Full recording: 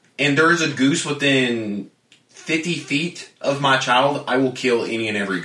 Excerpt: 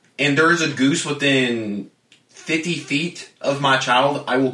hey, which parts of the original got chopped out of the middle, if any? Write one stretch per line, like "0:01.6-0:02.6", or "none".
none